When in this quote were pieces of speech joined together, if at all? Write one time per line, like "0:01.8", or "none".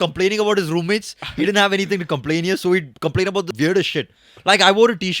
0:03.5